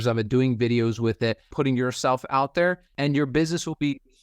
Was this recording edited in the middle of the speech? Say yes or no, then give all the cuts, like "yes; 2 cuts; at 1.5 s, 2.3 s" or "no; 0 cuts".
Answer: yes; 2 cuts; at 1.5 s, 2.9 s